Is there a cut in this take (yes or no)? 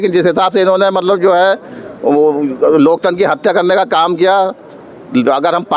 no